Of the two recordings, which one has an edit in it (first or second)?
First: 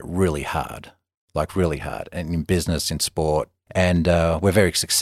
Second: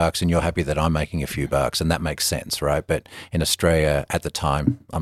first